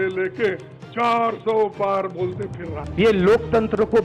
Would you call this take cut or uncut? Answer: uncut